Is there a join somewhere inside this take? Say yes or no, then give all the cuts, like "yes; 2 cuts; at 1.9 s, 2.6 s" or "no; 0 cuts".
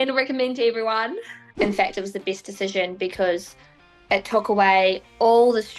yes; 1 cut; at 1.4 s